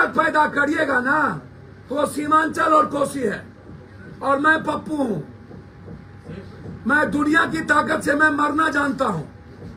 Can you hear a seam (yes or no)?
no